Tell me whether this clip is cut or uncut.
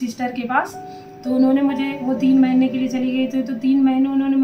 uncut